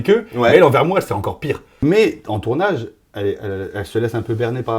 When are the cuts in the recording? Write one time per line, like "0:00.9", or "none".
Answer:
0:01.8